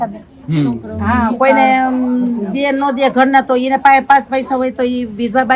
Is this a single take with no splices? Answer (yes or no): yes